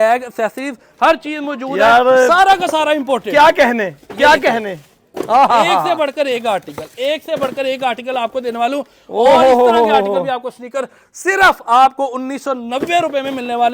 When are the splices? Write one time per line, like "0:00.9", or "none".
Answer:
none